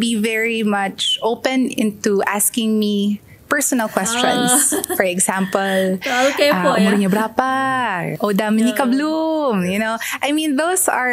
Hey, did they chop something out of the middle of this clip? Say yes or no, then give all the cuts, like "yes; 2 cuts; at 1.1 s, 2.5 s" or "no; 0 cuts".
no; 0 cuts